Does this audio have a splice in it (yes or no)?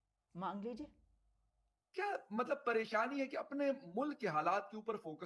yes